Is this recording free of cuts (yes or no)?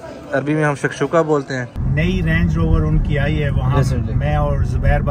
no